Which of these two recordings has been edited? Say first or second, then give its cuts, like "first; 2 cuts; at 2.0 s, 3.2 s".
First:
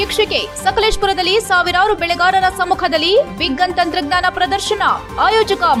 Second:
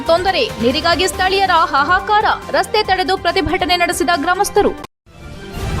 second; 1 cut; at 4.9 s